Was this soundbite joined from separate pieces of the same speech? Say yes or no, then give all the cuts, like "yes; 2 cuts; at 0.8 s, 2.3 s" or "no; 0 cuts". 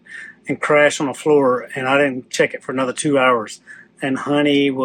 no; 0 cuts